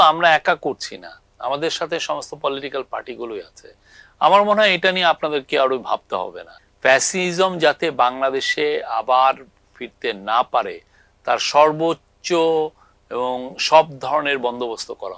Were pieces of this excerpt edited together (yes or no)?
yes